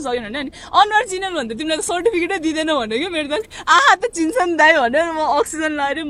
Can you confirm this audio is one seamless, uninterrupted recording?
yes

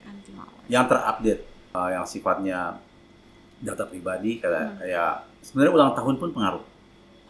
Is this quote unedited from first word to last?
no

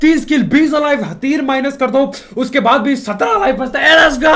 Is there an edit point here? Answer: no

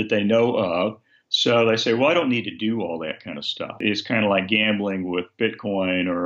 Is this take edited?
yes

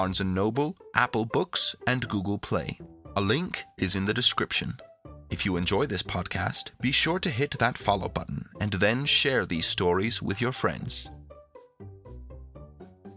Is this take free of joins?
no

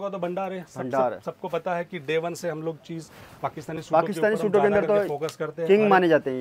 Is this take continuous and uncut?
yes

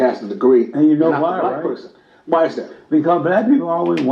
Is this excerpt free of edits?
yes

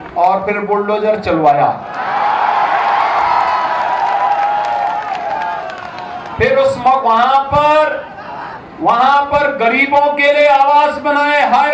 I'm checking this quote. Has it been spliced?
no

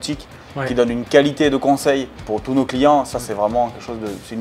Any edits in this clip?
no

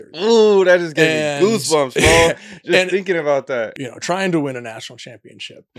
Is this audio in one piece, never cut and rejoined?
no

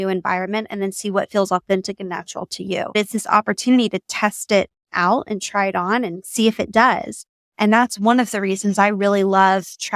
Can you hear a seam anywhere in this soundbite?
yes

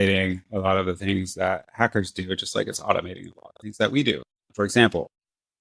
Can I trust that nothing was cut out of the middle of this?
no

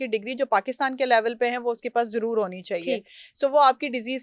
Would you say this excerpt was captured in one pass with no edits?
yes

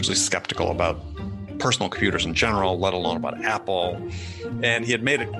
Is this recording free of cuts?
yes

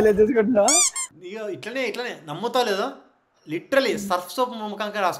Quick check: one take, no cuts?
no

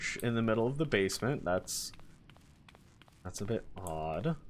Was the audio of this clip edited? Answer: no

